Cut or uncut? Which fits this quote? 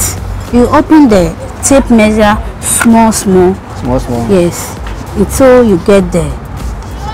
uncut